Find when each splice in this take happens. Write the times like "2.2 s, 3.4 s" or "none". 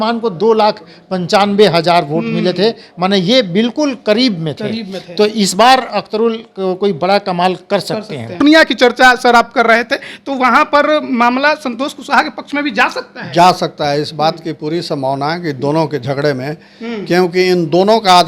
8.4 s